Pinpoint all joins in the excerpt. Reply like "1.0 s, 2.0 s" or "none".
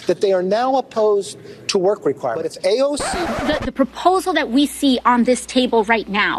3.1 s